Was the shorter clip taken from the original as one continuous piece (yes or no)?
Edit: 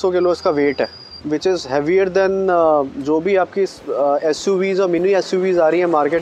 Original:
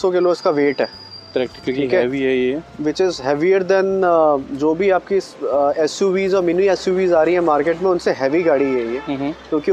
no